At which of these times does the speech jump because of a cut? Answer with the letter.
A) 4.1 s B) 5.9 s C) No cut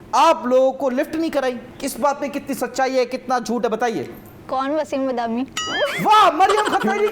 C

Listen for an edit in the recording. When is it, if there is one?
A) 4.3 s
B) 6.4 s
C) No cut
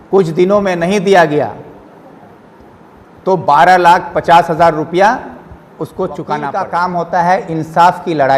B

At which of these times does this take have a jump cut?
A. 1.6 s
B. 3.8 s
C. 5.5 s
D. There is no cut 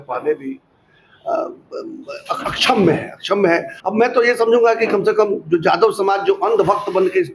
B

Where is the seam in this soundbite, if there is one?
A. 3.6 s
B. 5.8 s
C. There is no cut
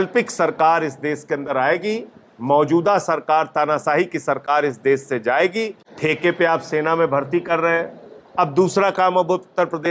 B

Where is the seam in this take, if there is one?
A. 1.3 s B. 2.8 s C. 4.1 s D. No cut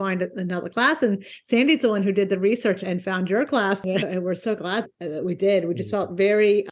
C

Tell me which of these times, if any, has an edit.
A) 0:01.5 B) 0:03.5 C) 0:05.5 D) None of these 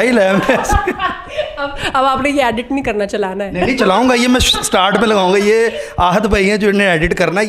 D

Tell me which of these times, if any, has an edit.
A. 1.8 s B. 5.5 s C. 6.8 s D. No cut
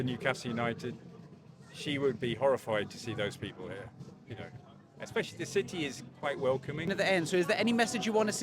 C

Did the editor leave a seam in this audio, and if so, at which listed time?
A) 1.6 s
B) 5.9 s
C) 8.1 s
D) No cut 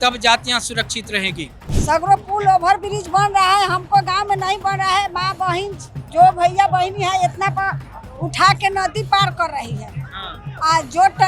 A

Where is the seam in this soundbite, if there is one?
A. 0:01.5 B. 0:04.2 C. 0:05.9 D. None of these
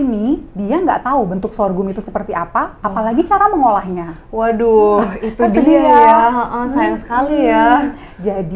D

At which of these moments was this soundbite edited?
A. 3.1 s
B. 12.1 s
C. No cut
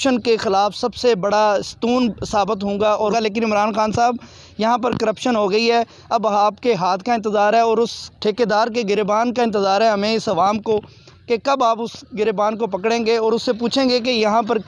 A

